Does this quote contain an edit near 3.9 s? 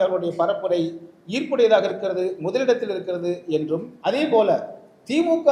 yes; 1 cut; at 3.9 s

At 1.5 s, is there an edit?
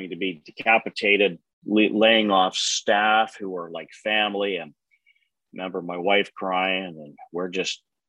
yes; 1 cut; at 1.5 s

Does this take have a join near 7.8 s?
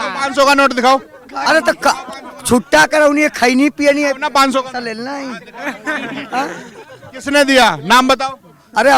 no; 0 cuts

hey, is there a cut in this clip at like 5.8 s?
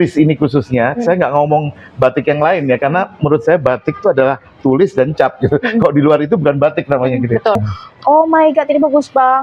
no; 1 cut; at 7.6 s

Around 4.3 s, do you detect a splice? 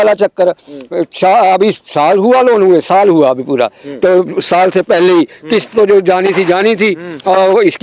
no; 0 cuts

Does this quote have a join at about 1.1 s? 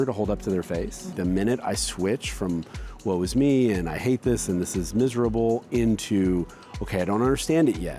yes; 1 cut; at 1.1 s

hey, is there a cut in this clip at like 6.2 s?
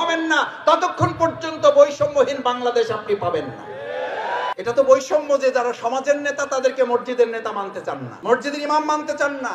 no; 2 cuts; at 4.5 s, 8.1 s

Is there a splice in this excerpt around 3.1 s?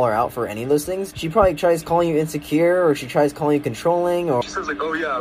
no; 2 cuts; at 1.1 s, 4.4 s

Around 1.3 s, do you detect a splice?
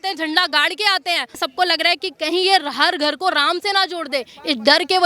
yes; 1 cut; at 1.3 s

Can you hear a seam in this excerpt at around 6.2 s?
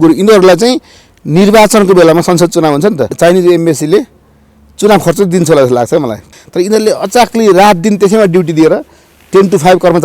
yes; 2 cuts; at 3.1 s, 6.2 s

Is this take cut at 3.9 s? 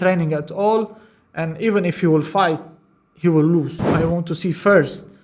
yes; 1 cut; at 3.9 s

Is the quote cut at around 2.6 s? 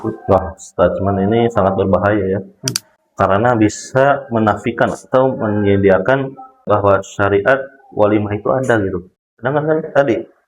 no; 1 cut; at 6.6 s

